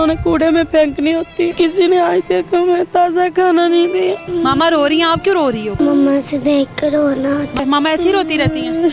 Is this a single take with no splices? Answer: no; 4 cuts; at 1.5 s, 4.2 s, 5.8 s, 7.5 s

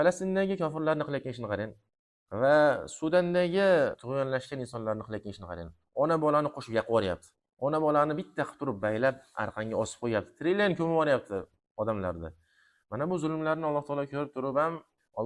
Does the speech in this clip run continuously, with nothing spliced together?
no; 1 cut; at 4.0 s

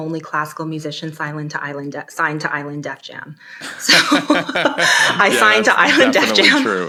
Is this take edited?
no; 0 cuts

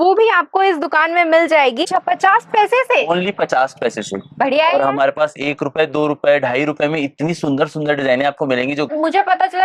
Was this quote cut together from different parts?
yes; 2 cuts; at 1.8 s, 8.9 s

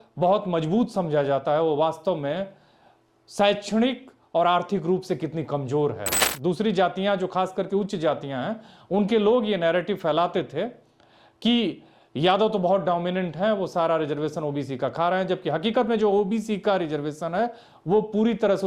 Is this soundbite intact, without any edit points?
no; 1 cut; at 6.2 s

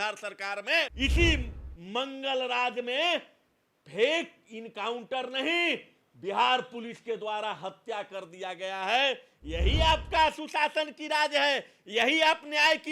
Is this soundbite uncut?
no; 1 cut; at 0.9 s

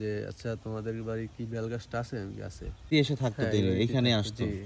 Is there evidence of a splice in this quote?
yes; 1 cut; at 2.9 s

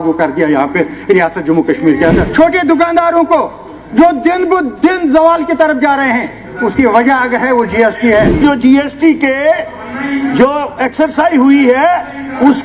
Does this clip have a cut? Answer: yes; 2 cuts; at 2.2 s, 8.3 s

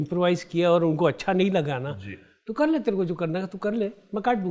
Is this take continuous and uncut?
yes; 0 cuts

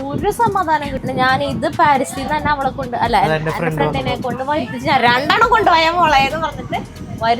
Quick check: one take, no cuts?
no; 1 cut; at 0.9 s

